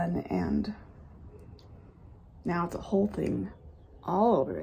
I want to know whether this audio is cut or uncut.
uncut